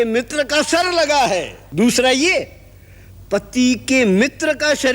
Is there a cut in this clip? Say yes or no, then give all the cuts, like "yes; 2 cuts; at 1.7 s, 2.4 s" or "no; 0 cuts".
yes; 1 cut; at 1.6 s